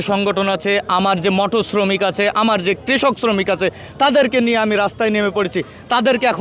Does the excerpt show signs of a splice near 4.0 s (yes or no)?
no